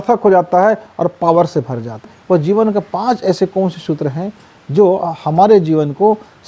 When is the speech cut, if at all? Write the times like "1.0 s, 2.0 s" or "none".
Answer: 2.1 s